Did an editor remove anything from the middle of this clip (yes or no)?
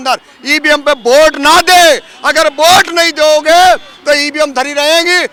no